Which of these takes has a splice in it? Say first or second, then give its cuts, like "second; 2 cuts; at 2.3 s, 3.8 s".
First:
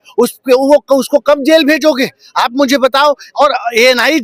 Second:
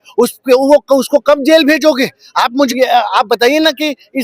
second; 1 cut; at 2.7 s